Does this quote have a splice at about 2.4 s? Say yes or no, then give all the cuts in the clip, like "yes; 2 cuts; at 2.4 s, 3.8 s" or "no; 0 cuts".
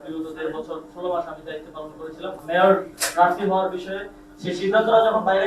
yes; 1 cut; at 2.4 s